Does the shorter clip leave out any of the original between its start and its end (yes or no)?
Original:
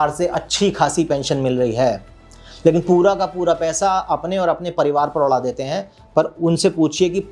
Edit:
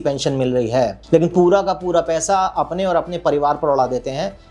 yes